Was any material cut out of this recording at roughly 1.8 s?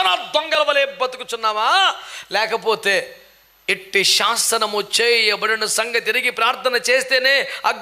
no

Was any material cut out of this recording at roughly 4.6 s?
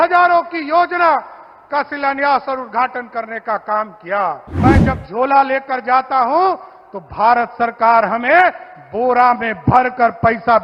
yes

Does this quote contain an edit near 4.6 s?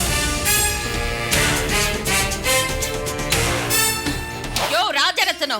yes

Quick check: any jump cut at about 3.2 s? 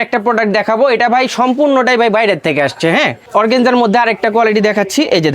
yes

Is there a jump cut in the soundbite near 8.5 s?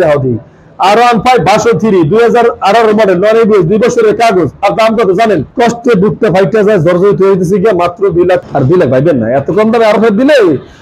yes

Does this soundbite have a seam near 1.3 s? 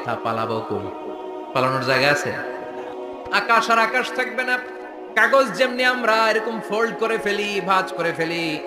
no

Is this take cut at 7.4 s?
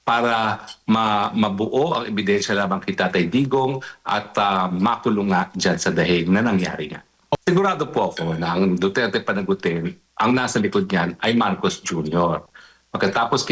yes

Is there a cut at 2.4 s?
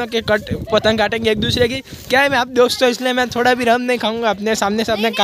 no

